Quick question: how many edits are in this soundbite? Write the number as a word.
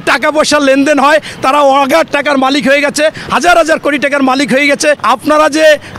one